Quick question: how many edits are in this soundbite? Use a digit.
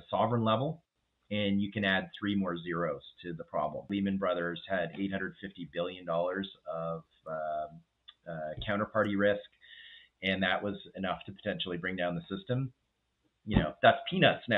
1